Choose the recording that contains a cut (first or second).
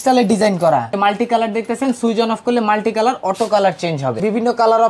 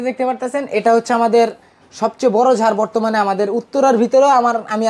first